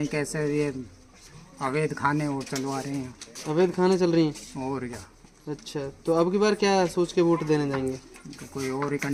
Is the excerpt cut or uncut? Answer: uncut